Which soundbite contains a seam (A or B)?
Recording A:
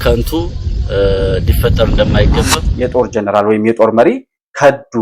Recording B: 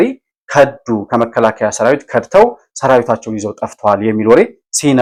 A